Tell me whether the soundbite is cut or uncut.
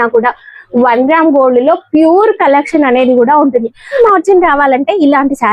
cut